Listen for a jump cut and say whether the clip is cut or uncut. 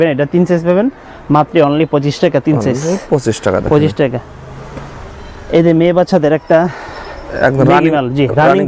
uncut